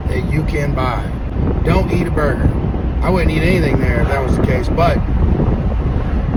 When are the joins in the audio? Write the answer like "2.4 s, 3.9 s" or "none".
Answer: none